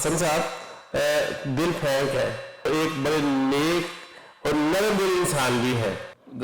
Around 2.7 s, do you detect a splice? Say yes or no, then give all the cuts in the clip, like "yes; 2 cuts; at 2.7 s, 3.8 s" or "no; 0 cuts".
yes; 1 cut; at 2.7 s